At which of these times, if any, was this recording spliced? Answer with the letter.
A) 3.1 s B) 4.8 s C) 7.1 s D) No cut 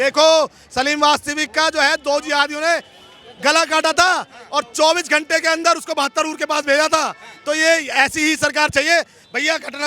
D